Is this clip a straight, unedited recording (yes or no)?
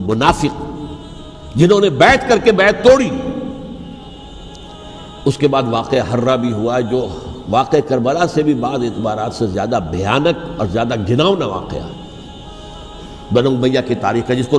no